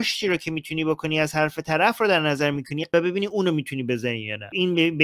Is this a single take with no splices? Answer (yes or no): yes